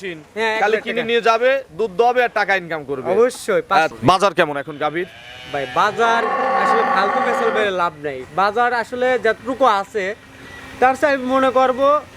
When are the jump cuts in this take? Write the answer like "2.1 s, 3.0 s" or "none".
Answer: 3.9 s

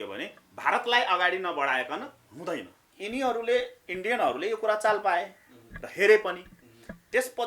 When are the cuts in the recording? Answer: 2.9 s

